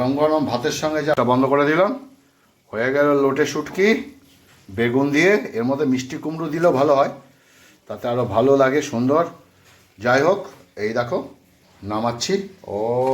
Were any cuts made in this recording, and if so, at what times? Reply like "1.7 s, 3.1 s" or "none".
1.2 s